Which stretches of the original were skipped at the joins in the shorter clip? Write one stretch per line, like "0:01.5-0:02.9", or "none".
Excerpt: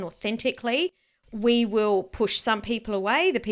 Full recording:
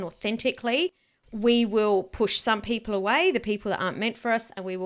none